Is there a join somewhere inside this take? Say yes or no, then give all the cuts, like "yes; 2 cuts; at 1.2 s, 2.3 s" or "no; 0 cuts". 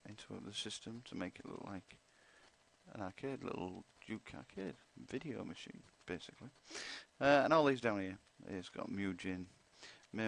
yes; 1 cut; at 7.4 s